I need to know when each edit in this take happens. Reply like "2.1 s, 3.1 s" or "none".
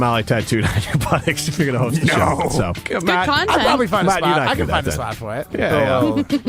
2.8 s, 5.4 s